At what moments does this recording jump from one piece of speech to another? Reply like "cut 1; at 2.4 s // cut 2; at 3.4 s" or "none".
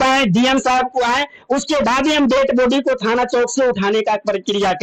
none